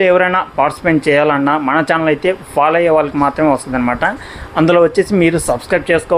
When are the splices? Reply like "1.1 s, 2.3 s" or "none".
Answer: none